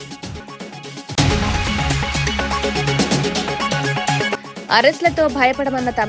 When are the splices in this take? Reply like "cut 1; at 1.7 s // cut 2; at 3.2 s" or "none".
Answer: cut 1; at 1.2 s // cut 2; at 4.2 s